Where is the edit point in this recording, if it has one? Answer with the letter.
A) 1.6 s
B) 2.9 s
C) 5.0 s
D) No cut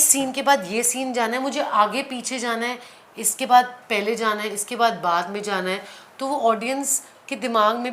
D